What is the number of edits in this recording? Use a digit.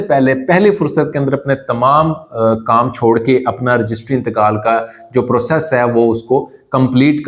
0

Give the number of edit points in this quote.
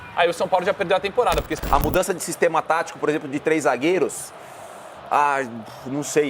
1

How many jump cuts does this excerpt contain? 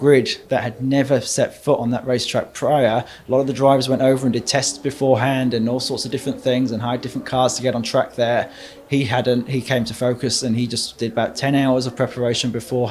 0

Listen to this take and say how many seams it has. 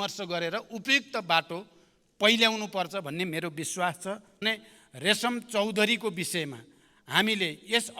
1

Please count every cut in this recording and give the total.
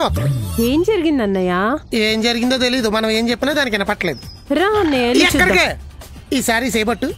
0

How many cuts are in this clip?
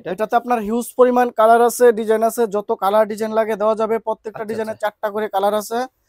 0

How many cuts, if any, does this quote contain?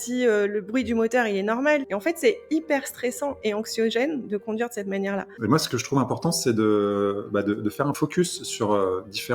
3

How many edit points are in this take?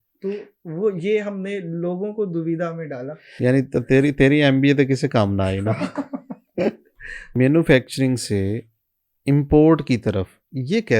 2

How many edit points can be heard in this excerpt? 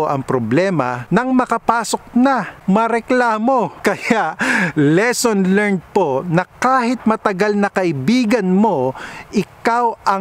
3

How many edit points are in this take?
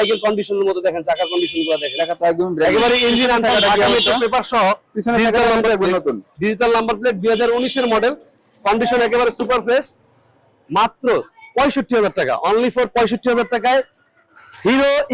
0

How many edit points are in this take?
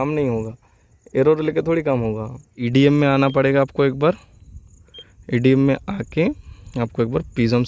1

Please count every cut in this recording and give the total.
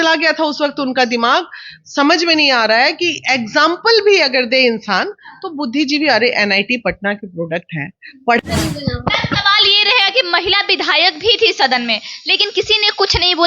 1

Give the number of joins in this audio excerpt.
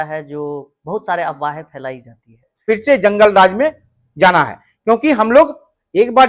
1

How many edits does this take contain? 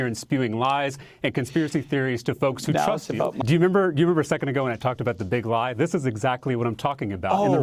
1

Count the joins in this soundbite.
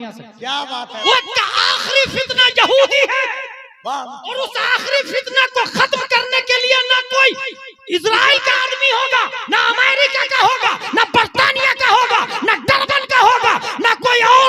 1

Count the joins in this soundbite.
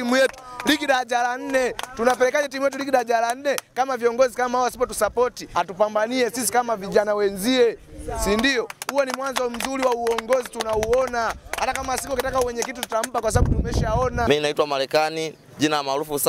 2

